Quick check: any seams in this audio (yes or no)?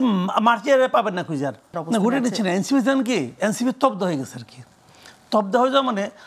yes